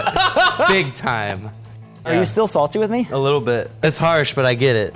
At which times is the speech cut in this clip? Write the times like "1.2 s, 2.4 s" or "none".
2.0 s, 3.8 s